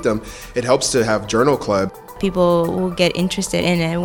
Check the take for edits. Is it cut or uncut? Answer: cut